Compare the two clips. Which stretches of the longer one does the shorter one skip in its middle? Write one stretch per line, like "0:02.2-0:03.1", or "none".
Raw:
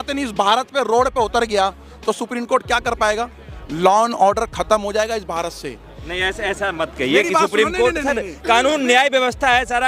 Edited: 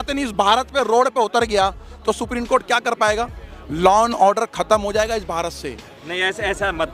none